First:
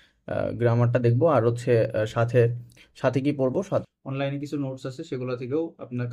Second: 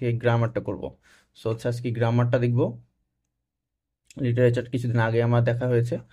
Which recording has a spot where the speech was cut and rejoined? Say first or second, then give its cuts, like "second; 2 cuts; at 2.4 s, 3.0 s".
first; 1 cut; at 3.8 s